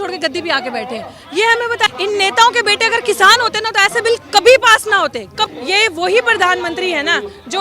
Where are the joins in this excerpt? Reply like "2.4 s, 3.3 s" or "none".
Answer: 1.9 s, 5.5 s